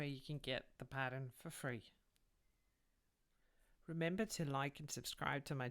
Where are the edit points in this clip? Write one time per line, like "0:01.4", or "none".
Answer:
0:03.0